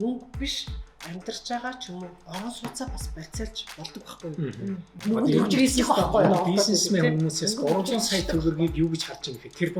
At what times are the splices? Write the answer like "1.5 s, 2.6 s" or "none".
5.0 s